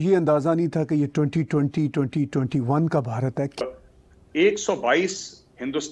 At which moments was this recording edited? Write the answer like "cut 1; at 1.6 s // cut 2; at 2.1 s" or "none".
cut 1; at 3.6 s